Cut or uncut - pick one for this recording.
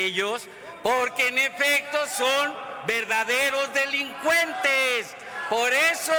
uncut